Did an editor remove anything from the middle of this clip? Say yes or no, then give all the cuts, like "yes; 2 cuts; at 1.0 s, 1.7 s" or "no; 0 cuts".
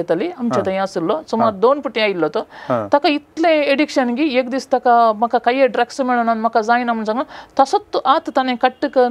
no; 0 cuts